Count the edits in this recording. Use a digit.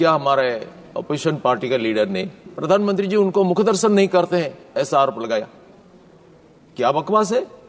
1